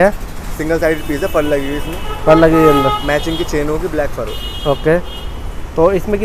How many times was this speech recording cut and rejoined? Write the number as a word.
zero